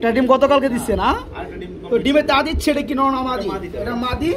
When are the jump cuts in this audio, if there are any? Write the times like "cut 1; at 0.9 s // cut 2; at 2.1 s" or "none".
none